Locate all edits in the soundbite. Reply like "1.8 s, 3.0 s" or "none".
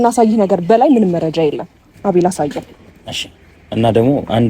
1.9 s